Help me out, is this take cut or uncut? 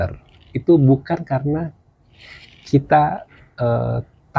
uncut